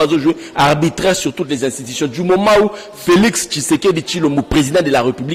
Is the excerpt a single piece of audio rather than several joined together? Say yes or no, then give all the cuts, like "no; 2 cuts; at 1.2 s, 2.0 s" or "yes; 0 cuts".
yes; 0 cuts